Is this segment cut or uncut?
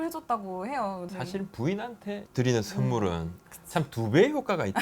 cut